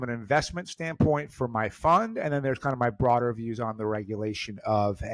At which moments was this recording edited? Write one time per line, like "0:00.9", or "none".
none